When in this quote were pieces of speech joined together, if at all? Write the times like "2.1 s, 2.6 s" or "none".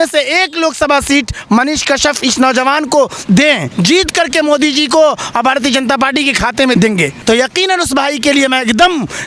3.7 s, 6.8 s